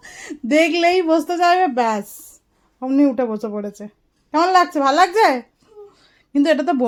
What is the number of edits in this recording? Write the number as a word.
zero